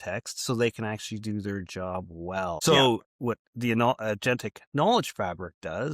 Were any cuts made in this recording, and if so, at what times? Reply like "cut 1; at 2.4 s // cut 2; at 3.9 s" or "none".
cut 1; at 2.6 s